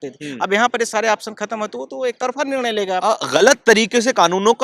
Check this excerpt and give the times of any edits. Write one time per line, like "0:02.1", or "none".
0:03.2